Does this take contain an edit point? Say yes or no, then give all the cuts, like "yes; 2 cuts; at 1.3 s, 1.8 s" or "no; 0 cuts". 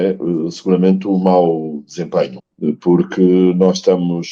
yes; 1 cut; at 2.4 s